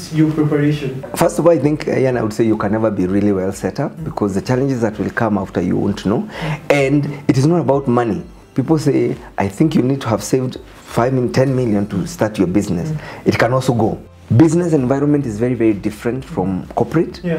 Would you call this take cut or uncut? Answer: cut